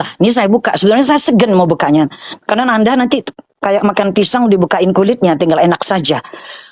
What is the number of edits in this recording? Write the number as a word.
zero